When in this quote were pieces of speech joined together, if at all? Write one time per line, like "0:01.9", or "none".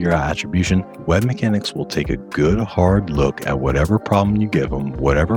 none